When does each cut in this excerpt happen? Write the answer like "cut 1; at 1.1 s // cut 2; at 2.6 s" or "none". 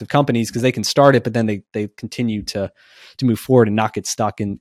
none